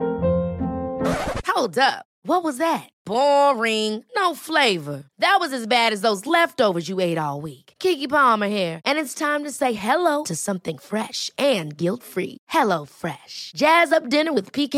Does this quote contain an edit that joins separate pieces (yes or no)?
no